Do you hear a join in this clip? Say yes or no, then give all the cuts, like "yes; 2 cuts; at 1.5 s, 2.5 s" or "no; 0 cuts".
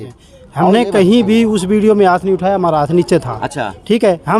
no; 0 cuts